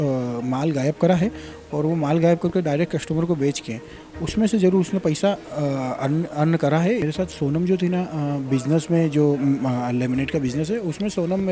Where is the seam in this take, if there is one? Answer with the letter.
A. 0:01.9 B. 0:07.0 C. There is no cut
B